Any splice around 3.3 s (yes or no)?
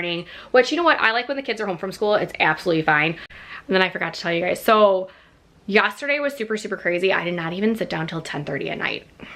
yes